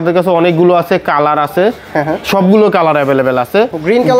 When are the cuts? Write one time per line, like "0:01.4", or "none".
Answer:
none

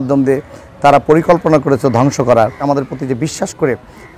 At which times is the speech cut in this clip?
0:02.6

